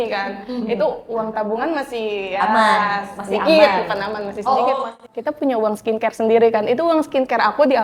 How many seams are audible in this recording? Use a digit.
0